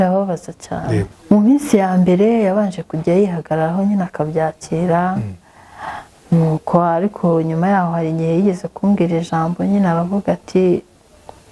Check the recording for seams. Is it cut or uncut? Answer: cut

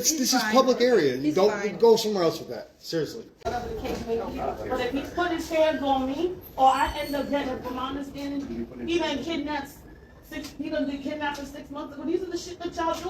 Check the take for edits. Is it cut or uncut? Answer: cut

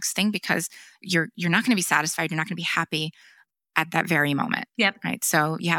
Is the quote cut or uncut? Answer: uncut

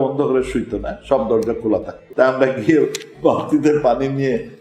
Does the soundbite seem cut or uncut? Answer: cut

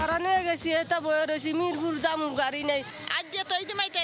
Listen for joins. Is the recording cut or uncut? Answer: uncut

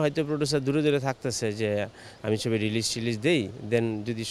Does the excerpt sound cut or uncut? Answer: uncut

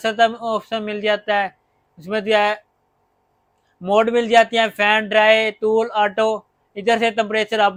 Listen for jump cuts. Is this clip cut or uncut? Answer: uncut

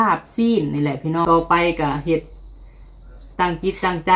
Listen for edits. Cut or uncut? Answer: cut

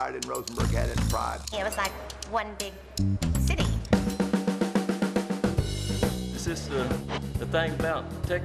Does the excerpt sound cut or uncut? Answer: uncut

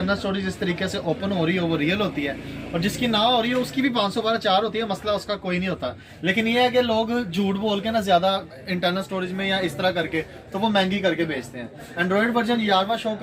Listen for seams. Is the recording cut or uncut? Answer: uncut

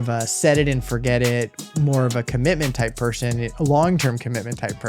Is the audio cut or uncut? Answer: uncut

